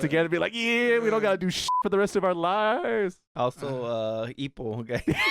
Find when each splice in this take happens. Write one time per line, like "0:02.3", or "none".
0:01.8
0:03.2